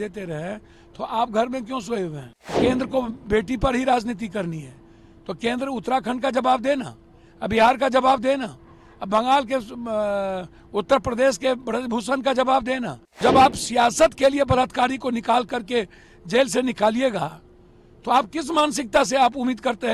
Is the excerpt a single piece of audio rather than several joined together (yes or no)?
no